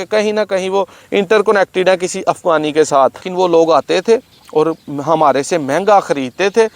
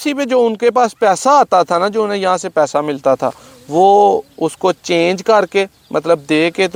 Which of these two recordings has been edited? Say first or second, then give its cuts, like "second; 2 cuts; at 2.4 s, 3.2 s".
first; 1 cut; at 3.2 s